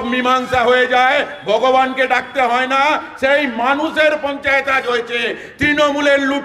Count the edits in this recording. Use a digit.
0